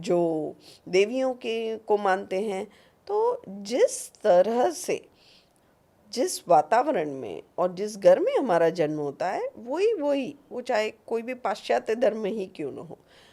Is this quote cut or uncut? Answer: uncut